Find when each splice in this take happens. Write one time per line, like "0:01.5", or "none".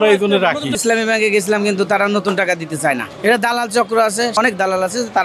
0:00.8
0:03.1
0:04.4